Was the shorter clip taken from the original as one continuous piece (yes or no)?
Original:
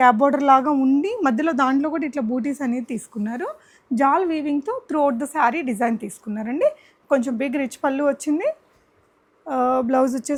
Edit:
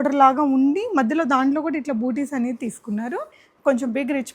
no